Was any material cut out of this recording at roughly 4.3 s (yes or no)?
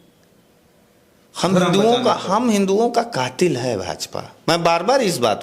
no